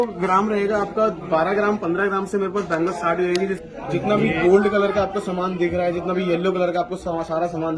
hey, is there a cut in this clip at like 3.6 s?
yes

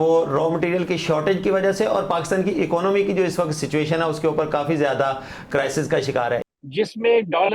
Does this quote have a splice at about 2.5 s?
no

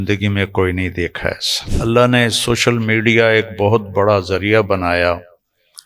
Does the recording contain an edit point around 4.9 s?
no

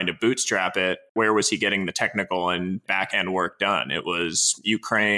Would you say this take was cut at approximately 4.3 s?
no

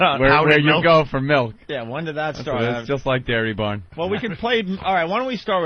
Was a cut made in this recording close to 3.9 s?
no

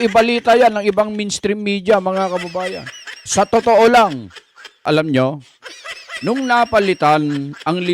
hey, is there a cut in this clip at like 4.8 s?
yes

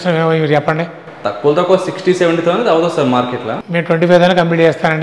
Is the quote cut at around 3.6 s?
yes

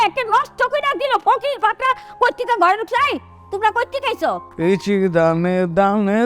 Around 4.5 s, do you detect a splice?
yes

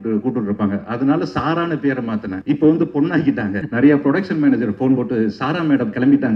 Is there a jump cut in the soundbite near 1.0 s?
no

